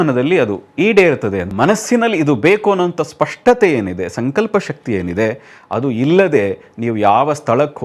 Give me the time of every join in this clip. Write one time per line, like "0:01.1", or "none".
0:01.5

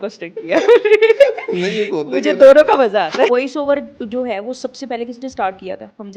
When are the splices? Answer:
0:03.3

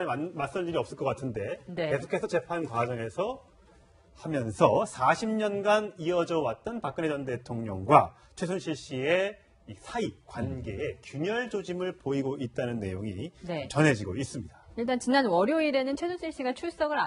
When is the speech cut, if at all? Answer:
none

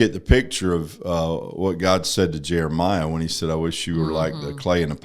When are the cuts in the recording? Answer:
none

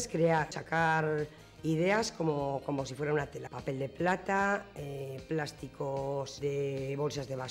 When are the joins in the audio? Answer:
0:03.5
0:06.3

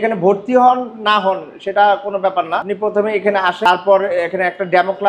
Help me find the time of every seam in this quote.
0:02.7
0:03.7

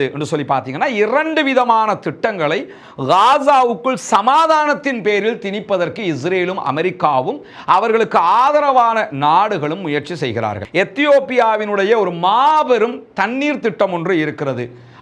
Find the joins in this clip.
0:10.6

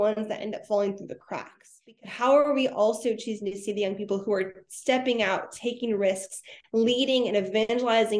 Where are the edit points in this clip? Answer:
0:01.7

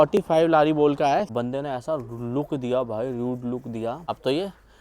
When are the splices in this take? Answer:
0:01.3
0:04.0

